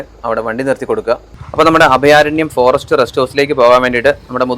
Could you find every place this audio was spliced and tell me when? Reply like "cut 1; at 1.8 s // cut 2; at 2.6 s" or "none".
cut 1; at 1.3 s